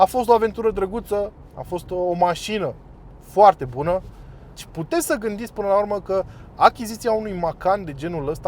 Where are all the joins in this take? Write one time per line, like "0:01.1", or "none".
0:04.6